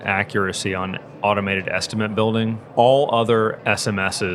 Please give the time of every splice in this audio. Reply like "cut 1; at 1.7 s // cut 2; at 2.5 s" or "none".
cut 1; at 2.6 s // cut 2; at 3.6 s